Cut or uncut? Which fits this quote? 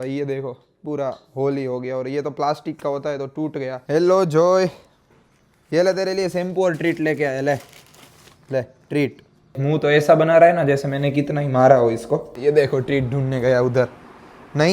cut